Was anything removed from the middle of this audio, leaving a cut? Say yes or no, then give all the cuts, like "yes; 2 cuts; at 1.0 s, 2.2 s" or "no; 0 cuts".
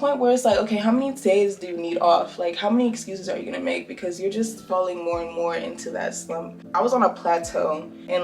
no; 0 cuts